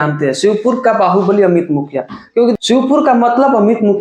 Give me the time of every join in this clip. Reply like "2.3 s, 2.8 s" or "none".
2.5 s